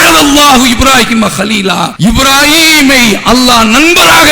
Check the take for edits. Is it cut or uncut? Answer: cut